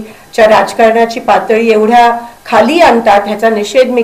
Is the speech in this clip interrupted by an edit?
no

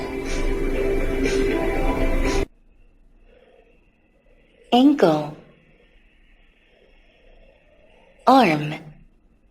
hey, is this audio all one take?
no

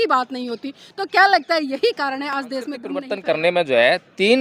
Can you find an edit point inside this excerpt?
yes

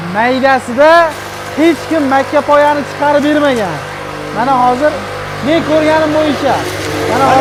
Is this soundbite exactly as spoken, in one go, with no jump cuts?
yes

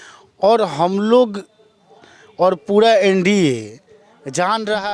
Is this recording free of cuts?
yes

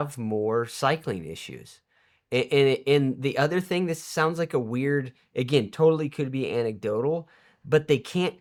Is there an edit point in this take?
no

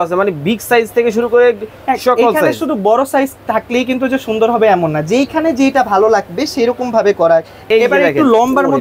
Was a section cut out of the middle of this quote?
yes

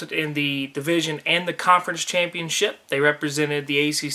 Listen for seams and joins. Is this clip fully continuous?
yes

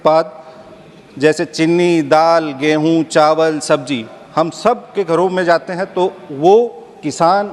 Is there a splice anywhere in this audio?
no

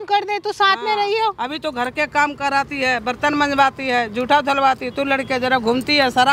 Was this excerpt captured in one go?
yes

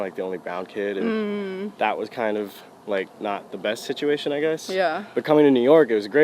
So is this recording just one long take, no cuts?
yes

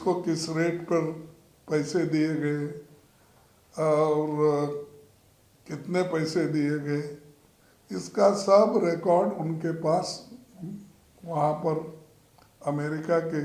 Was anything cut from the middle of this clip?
no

